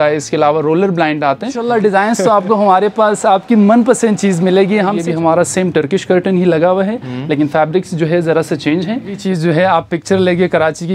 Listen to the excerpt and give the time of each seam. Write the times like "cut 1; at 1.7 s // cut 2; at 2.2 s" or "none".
cut 1; at 1.6 s // cut 2; at 5.0 s // cut 3; at 9.2 s

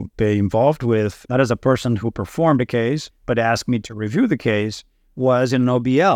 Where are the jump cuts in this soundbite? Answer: cut 1; at 1.2 s // cut 2; at 3.1 s

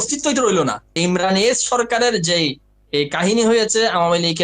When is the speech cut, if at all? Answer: cut 1; at 1.0 s

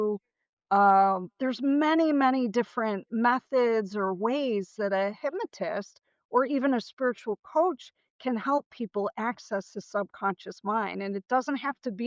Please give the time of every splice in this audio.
none

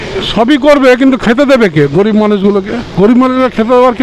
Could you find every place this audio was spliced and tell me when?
cut 1; at 2.8 s

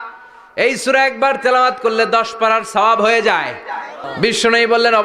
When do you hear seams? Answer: cut 1; at 4.0 s

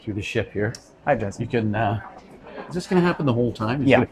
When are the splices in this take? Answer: none

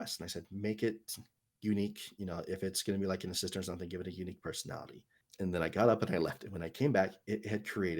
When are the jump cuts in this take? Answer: cut 1; at 5.2 s

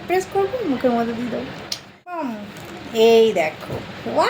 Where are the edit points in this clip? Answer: cut 1; at 2.4 s

